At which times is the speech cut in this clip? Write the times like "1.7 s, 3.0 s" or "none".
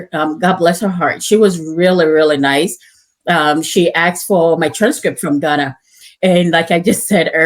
none

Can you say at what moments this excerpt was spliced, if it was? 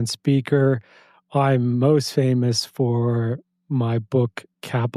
none

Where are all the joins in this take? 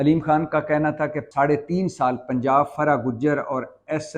1.2 s

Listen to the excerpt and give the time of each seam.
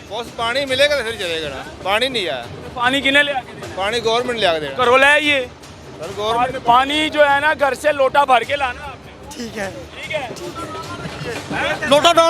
none

